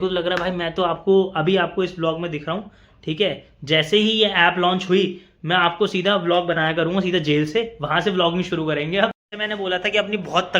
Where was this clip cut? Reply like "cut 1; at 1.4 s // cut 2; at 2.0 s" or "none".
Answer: cut 1; at 9.3 s